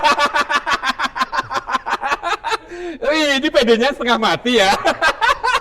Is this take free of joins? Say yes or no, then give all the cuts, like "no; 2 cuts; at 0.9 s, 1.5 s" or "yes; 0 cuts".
yes; 0 cuts